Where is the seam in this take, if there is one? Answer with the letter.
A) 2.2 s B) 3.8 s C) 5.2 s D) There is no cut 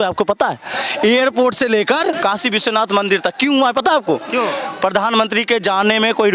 A